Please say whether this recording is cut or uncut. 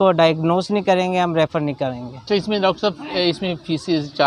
cut